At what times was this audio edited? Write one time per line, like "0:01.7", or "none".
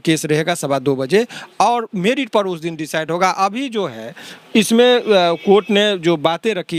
none